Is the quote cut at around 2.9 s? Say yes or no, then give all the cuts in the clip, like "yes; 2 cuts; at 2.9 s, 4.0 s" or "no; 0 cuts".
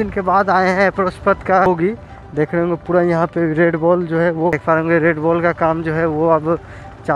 no; 2 cuts; at 1.7 s, 4.6 s